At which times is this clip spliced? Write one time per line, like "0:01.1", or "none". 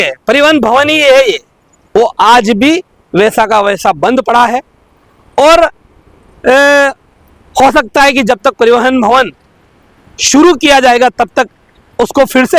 none